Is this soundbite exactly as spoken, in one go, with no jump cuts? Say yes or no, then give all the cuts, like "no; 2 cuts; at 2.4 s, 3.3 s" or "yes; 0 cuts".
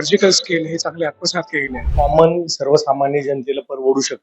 no; 1 cut; at 1.8 s